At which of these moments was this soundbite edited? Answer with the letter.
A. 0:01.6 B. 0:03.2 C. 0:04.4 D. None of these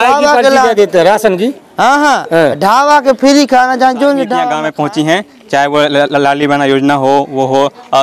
C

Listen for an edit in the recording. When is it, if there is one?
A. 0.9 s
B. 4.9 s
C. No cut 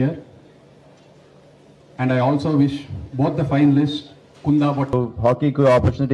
B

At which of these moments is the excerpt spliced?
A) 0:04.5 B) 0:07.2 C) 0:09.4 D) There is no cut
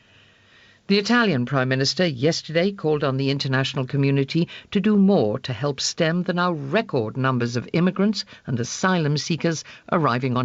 B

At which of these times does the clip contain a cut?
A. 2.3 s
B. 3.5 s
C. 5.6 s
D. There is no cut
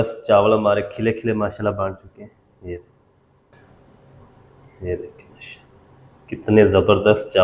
B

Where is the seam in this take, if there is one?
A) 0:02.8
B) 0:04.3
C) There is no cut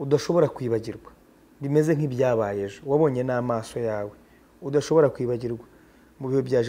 C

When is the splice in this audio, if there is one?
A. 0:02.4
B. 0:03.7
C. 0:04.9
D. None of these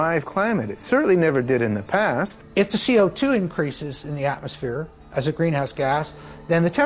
A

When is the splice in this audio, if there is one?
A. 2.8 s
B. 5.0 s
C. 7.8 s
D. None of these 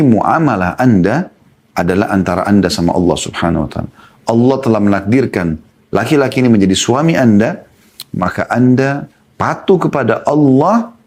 D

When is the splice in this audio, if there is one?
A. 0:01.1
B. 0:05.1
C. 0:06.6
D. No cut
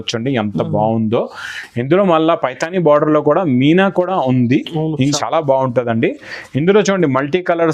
B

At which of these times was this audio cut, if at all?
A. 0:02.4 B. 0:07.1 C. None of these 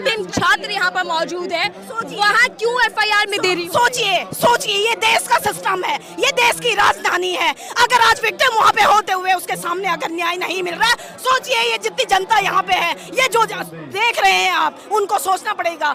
C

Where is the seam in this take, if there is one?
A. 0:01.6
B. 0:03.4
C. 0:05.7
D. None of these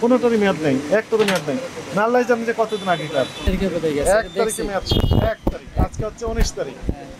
B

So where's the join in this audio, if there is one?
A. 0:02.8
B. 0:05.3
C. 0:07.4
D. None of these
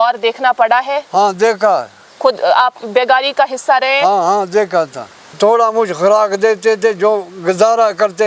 B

